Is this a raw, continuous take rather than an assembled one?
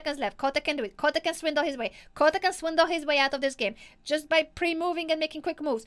yes; 0 cuts

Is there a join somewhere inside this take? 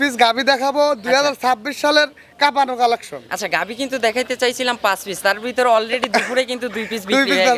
no; 0 cuts

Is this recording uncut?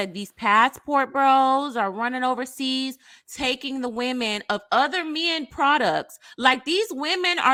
yes; 0 cuts

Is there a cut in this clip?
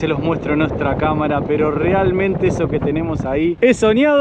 no; 0 cuts

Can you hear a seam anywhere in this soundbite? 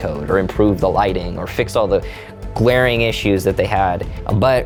no; 0 cuts

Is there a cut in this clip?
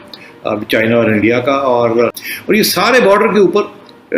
yes; 1 cut; at 2.2 s

